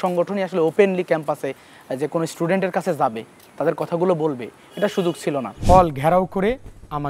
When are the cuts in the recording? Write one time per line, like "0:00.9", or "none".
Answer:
0:05.5